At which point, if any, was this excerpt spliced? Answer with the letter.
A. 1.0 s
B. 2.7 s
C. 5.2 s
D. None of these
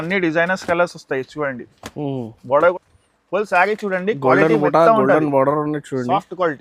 B